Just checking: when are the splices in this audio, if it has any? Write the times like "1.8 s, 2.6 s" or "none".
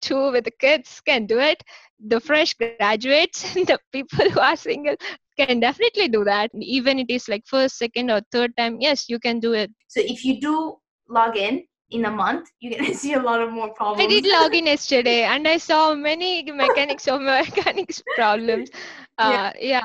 9.8 s